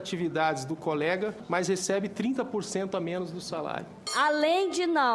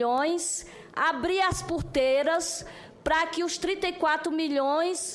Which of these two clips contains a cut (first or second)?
first